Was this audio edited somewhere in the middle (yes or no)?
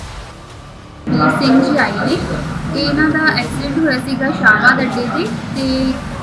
yes